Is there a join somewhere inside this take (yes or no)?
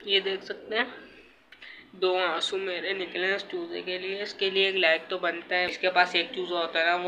yes